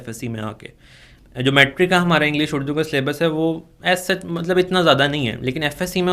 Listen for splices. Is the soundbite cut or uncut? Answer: uncut